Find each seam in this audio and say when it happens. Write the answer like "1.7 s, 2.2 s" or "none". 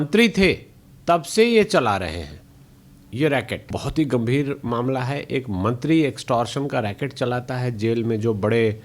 3.8 s